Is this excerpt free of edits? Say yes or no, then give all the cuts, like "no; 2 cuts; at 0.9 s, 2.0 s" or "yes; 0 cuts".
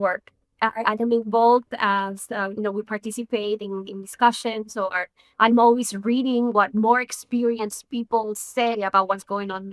yes; 0 cuts